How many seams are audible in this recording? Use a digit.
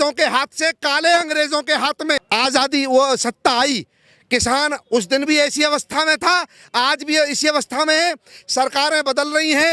1